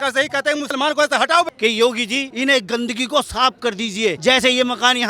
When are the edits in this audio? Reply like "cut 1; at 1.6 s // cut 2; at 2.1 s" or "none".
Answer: cut 1; at 1.5 s // cut 2; at 2.3 s // cut 3; at 4.2 s